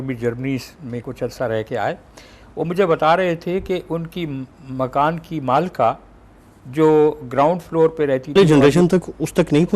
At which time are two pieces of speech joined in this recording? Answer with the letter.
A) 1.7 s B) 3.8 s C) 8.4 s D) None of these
C